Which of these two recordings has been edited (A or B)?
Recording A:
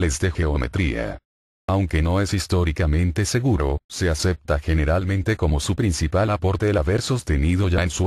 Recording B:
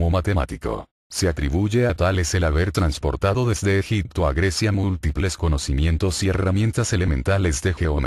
B